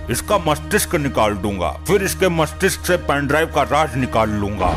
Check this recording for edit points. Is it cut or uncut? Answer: uncut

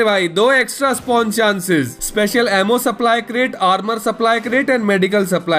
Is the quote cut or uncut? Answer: cut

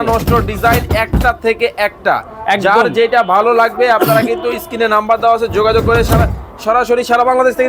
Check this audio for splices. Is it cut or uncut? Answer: uncut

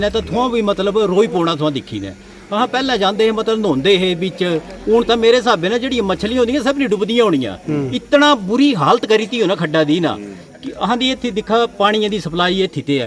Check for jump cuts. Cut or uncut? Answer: uncut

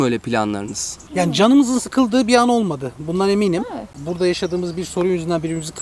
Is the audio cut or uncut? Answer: cut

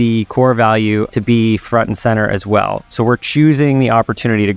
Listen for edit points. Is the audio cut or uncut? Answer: cut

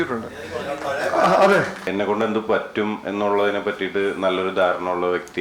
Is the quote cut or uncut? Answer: cut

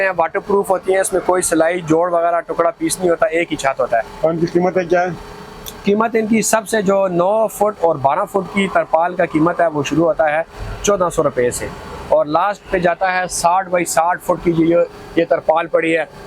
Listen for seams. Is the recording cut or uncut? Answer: uncut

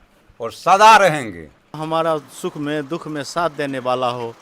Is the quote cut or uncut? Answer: cut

